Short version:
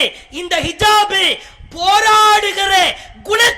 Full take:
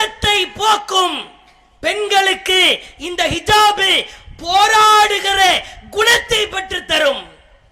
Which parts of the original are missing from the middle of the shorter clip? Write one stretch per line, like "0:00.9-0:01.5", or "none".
none